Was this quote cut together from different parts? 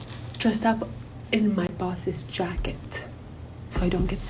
no; 0 cuts

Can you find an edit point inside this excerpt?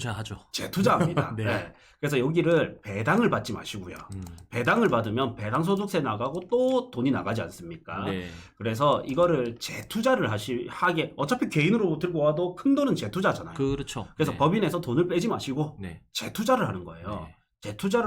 no; 0 cuts

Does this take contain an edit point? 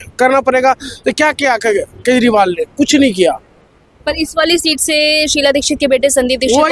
no; 0 cuts

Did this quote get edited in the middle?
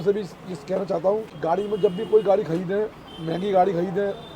yes; 1 cut; at 1.3 s

